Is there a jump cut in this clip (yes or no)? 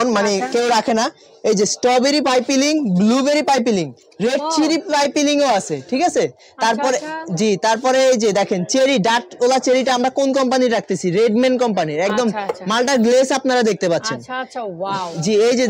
no